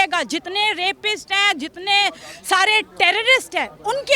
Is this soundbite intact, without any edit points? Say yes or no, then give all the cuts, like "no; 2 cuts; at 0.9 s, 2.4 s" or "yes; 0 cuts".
yes; 0 cuts